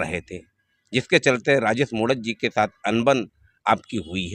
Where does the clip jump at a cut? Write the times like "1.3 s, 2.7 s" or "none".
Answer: none

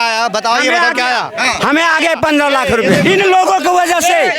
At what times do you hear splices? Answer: 3.0 s

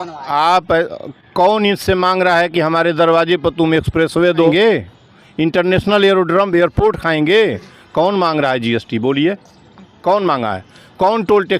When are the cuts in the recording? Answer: 4.5 s

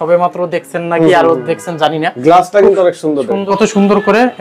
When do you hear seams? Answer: 3.4 s

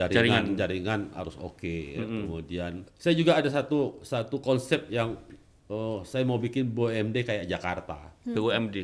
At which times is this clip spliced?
2.8 s

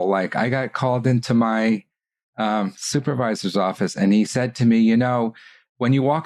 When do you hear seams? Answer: none

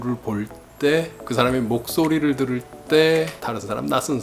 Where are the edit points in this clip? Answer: 1.2 s, 3.4 s

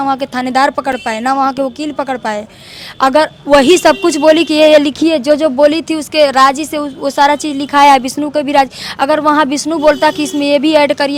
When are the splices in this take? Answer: none

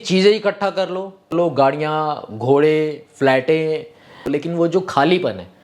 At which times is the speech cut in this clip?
1.3 s, 4.3 s

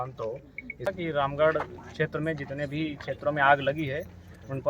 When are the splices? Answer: 0.9 s

